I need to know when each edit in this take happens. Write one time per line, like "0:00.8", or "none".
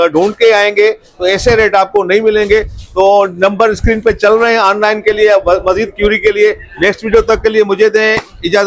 none